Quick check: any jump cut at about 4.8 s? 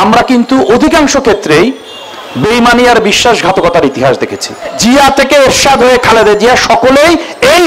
yes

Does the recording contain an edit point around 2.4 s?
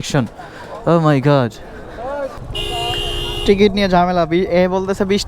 yes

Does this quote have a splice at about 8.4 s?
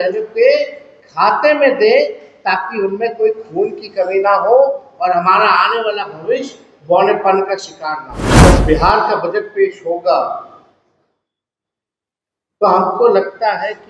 yes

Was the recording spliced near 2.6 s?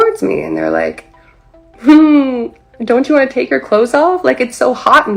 no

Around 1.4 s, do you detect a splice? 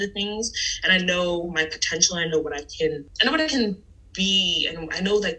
no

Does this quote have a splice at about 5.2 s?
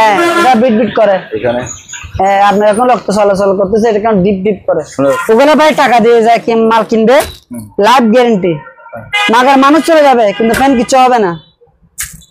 yes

